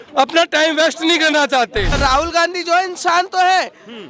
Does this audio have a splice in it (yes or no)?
yes